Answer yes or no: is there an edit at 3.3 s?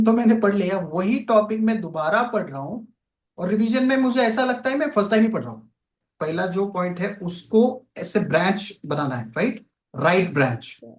no